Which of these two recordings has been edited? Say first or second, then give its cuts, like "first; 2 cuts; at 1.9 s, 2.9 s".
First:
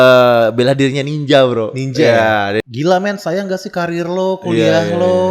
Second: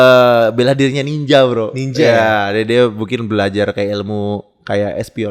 first; 1 cut; at 2.6 s